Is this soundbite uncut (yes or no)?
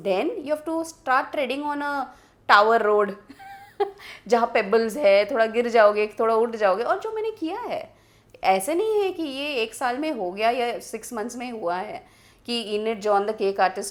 yes